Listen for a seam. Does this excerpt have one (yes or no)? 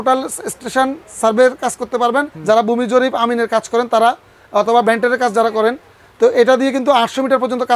yes